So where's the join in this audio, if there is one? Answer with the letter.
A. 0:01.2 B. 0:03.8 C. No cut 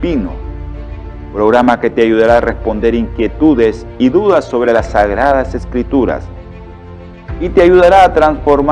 C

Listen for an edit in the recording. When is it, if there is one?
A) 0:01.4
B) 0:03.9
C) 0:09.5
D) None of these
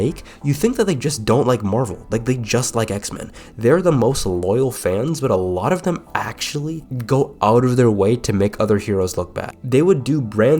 C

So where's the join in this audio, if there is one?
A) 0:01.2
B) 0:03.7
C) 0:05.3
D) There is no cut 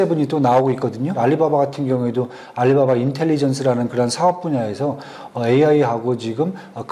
A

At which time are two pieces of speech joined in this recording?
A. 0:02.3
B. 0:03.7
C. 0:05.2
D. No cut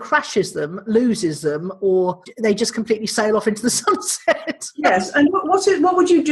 A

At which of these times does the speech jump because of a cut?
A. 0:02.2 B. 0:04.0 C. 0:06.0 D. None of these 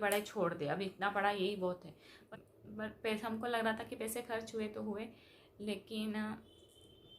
A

